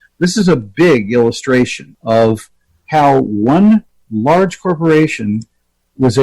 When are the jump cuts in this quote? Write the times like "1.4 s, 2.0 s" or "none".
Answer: 1.9 s